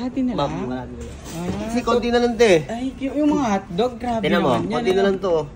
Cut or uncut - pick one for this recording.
uncut